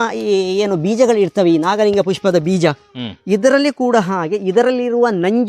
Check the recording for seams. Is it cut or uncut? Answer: uncut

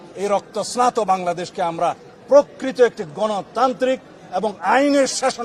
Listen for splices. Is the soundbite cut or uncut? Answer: uncut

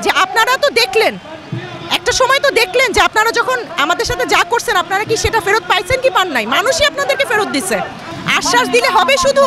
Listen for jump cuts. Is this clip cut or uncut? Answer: cut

